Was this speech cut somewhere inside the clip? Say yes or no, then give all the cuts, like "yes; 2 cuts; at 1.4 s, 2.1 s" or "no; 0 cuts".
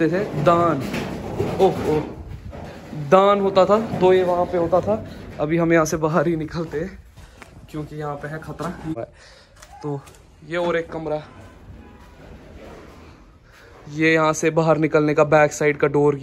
no; 0 cuts